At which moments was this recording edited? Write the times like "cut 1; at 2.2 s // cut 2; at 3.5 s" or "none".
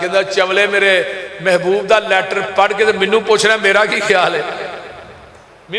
none